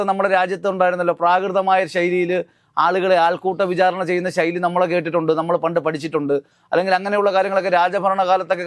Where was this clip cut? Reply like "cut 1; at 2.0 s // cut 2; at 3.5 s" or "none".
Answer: none